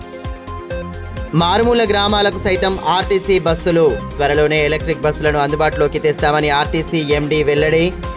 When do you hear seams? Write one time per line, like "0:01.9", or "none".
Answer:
0:00.9